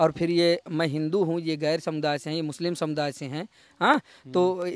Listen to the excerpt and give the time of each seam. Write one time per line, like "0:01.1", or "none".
none